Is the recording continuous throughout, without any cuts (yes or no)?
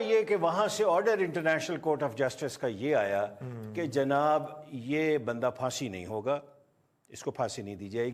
yes